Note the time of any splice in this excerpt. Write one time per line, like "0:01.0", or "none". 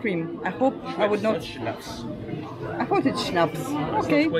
none